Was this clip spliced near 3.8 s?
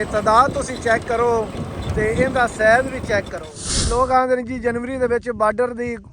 yes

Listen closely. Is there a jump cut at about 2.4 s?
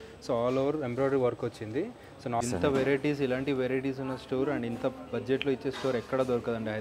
yes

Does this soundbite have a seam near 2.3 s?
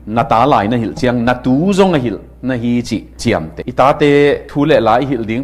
no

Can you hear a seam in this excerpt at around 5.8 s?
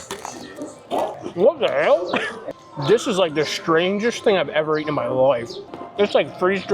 no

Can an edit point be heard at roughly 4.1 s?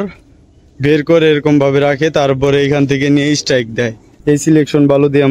yes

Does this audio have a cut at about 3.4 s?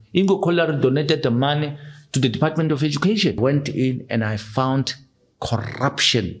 yes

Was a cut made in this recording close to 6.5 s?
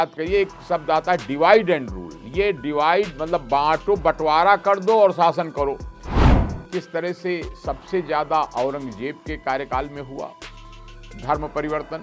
yes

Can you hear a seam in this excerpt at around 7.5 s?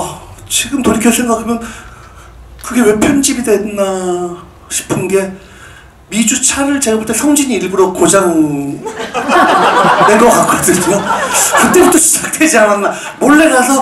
no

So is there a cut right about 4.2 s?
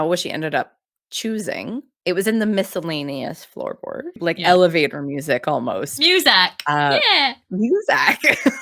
yes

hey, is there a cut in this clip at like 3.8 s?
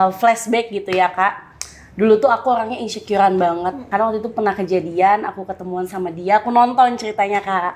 yes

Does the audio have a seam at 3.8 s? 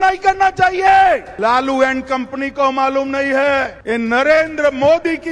yes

